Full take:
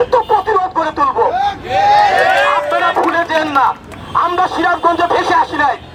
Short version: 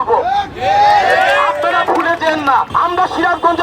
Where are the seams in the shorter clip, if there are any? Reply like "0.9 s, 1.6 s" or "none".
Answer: 2.7 s